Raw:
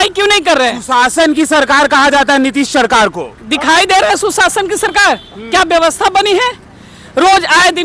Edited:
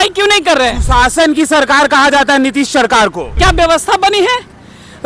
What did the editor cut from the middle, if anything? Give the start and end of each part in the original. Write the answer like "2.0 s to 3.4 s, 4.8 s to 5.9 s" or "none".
3.2 s to 5.4 s